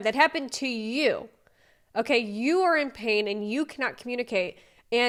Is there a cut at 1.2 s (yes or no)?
no